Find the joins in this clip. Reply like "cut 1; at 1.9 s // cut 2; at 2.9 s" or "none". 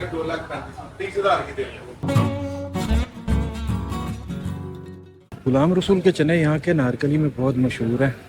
cut 1; at 2.0 s